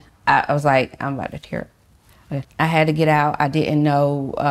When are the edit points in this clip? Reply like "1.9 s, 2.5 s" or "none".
2.5 s